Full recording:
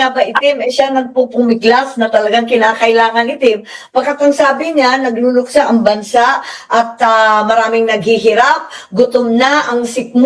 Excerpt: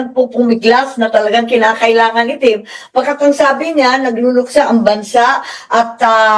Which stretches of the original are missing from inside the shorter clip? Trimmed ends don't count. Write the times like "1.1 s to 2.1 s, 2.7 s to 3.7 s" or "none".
none